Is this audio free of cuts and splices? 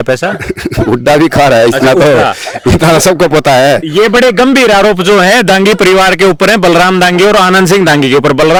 yes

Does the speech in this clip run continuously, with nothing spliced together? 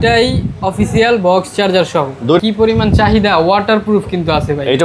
no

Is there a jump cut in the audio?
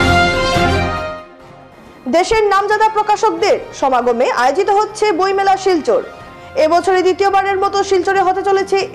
yes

